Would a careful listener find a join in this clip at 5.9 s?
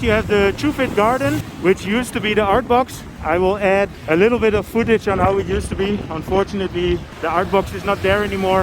no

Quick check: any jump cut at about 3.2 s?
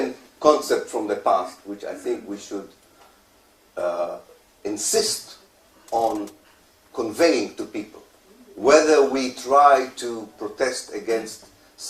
yes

